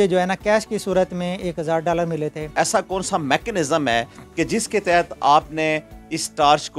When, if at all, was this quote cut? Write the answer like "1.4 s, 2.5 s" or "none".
2.6 s